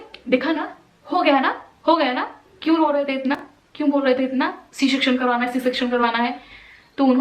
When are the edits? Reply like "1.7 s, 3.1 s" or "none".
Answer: none